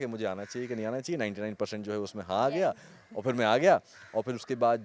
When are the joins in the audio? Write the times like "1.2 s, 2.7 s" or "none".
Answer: none